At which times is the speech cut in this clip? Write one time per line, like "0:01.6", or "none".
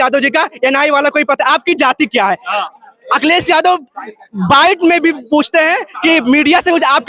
none